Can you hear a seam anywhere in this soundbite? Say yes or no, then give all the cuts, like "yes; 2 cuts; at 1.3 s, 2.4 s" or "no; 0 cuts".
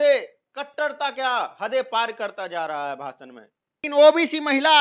yes; 1 cut; at 3.8 s